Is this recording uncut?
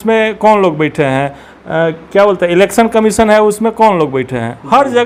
yes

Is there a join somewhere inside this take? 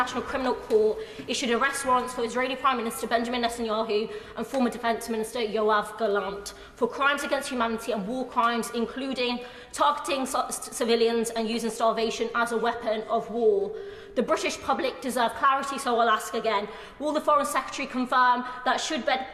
no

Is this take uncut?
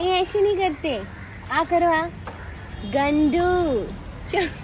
yes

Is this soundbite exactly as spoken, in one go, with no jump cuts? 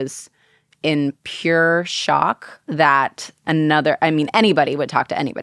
yes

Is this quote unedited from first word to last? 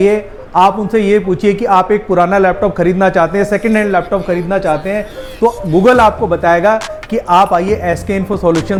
yes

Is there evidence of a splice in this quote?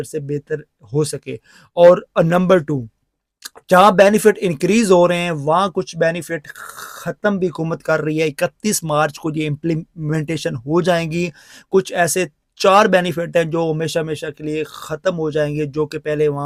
no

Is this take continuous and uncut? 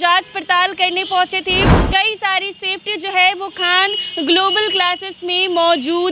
no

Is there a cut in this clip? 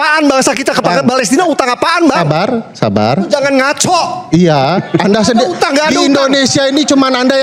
no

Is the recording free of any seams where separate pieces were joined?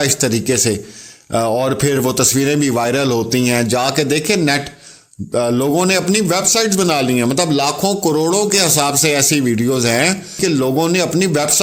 no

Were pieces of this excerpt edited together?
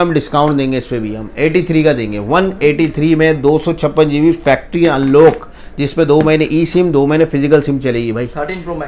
no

